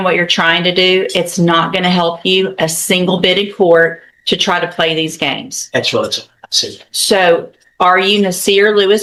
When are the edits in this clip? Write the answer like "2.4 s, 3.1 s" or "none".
none